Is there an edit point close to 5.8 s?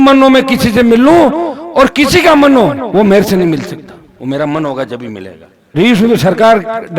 yes; 1 cut; at 5.8 s

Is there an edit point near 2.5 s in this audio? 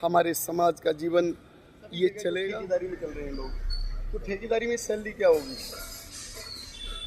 yes; 1 cut; at 2.5 s

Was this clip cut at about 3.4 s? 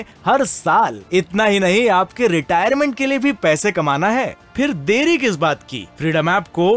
no; 0 cuts

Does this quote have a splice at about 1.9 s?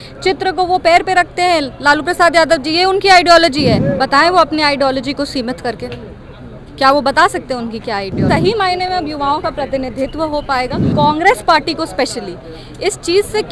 no; 3 cuts; at 3.8 s, 8.2 s, 10.8 s

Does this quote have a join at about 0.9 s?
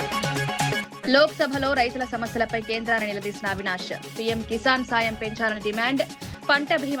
yes; 1 cut; at 0.9 s

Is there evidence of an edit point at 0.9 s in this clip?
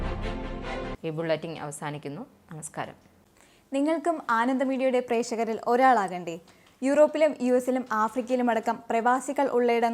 no; 0 cuts

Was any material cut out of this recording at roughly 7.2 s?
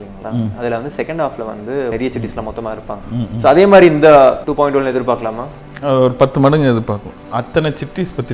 yes; 3 cuts; at 1.9 s, 4.4 s, 7.2 s

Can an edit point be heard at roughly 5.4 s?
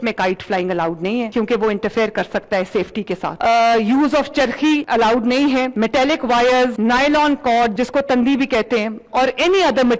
no; 1 cut; at 3.4 s

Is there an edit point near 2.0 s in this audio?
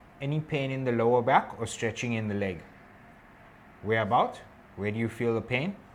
no; 0 cuts

